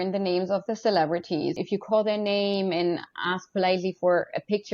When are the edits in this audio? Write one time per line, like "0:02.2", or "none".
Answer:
0:01.6